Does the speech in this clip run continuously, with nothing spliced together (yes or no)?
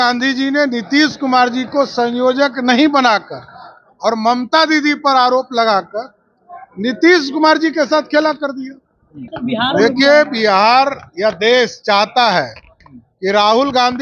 no